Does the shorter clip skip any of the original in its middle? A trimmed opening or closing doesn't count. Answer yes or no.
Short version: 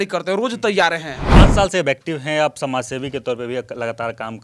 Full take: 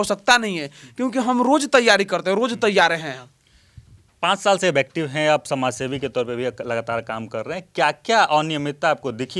yes